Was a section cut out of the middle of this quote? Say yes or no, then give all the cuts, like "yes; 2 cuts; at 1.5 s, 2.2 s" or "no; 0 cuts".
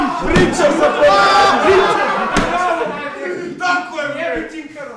no; 0 cuts